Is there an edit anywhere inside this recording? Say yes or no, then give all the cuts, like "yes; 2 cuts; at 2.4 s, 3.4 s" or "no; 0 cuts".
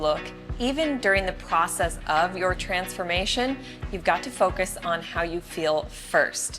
no; 0 cuts